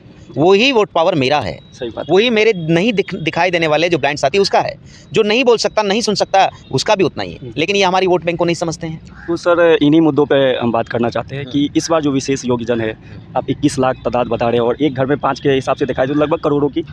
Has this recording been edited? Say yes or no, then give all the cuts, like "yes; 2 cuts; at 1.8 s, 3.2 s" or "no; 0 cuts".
no; 0 cuts